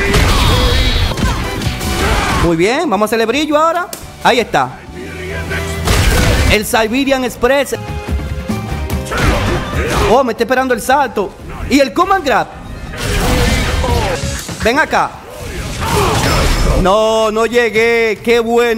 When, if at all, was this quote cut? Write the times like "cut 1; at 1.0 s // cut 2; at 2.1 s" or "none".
cut 1; at 1.1 s // cut 2; at 7.7 s // cut 3; at 14.2 s